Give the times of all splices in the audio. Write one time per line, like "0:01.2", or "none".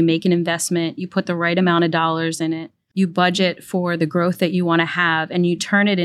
none

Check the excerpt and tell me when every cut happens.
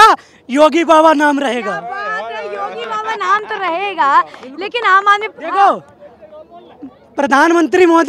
none

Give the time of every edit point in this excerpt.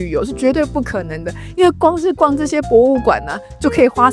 none

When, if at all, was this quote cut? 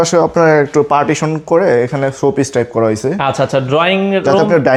none

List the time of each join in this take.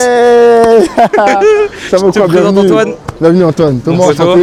none

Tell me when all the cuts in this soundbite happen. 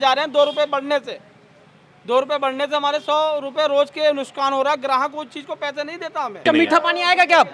0:06.4

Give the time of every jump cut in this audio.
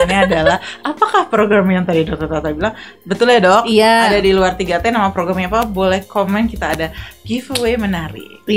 none

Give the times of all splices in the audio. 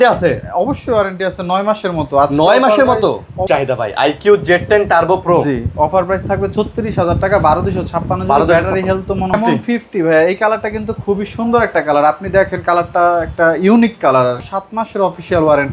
0:03.4
0:09.4
0:14.4

